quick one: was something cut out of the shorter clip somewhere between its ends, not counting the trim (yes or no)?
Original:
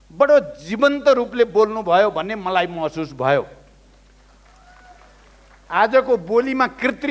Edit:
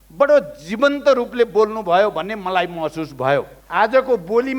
yes